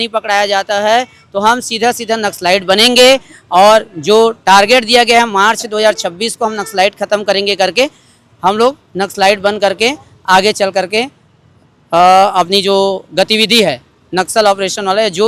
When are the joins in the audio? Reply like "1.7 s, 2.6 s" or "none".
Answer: none